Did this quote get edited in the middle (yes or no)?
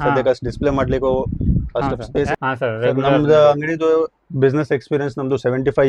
yes